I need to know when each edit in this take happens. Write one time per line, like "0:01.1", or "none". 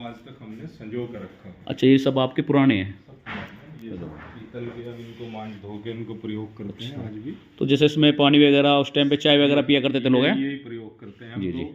none